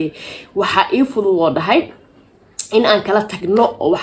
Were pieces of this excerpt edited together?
no; 0 cuts

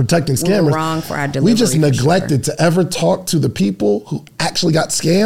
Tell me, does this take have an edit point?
no; 0 cuts

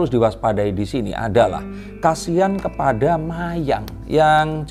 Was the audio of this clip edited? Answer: no; 0 cuts

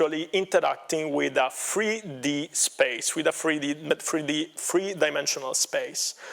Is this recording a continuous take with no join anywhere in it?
yes; 0 cuts

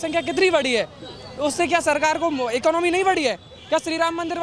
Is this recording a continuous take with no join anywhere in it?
yes; 0 cuts

